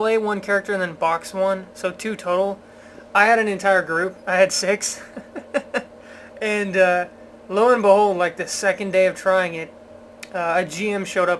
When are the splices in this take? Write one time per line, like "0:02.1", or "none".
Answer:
0:02.7